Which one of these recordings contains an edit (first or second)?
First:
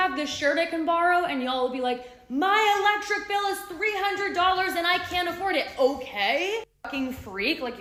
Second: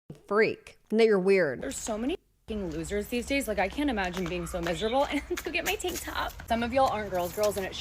second